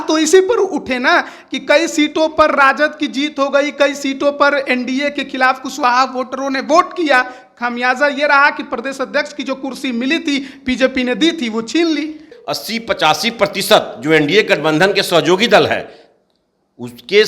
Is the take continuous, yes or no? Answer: no